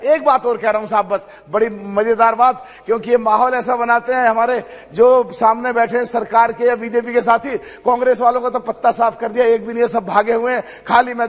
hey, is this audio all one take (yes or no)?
yes